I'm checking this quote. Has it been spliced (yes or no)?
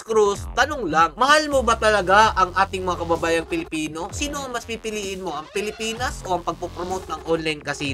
no